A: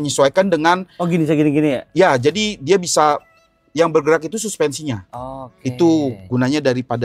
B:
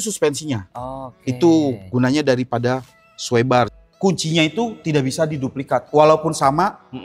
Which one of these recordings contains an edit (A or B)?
B